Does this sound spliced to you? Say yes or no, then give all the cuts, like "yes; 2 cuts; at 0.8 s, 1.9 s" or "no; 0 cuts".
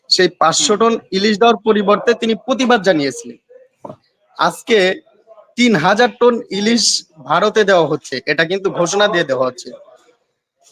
no; 0 cuts